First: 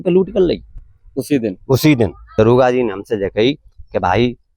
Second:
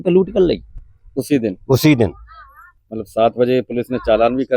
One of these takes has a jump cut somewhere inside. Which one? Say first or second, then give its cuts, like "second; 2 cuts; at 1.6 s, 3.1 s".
first; 1 cut; at 2.3 s